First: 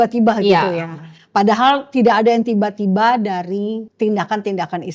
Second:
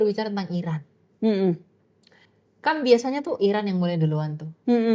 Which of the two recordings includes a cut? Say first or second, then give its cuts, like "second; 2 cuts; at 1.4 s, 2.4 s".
first; 1 cut; at 3.9 s